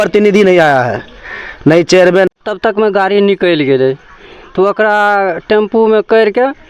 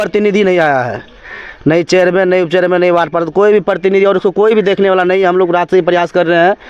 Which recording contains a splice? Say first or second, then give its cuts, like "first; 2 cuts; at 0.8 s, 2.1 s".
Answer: first; 1 cut; at 2.3 s